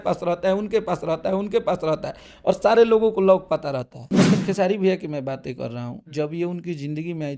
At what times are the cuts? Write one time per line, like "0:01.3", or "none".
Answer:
0:04.0